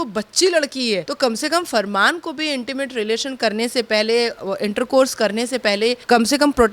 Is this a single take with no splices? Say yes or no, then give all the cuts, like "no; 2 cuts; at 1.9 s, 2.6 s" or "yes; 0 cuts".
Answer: no; 1 cut; at 1.1 s